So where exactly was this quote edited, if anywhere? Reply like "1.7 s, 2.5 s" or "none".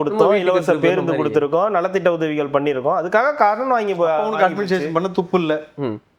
none